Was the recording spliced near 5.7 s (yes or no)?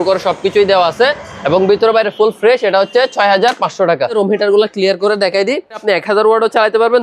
yes